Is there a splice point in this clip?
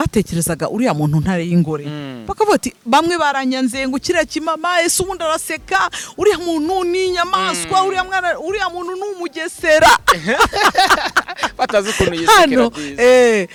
no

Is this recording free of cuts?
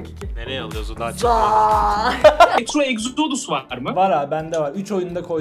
no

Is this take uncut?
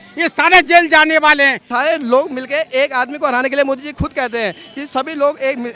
no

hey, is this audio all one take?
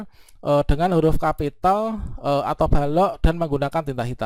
yes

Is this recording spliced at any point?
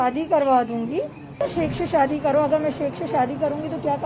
yes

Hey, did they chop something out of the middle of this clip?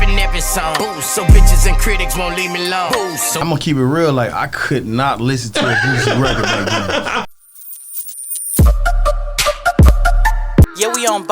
yes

